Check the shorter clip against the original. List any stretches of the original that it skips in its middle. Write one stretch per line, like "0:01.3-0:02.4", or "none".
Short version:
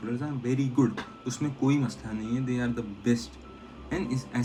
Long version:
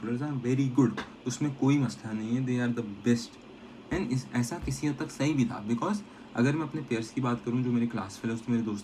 none